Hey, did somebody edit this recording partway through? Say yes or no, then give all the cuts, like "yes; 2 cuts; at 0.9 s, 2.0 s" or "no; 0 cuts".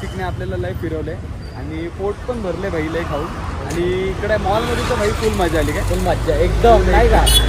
no; 0 cuts